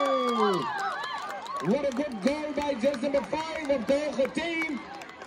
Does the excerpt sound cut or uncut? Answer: uncut